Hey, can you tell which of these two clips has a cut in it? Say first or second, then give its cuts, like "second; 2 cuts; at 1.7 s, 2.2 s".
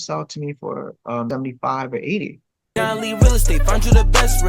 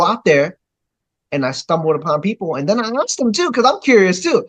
first; 2 cuts; at 1.3 s, 2.7 s